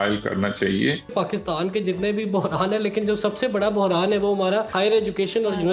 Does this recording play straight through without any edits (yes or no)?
no